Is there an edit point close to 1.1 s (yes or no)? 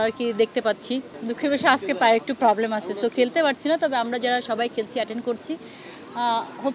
yes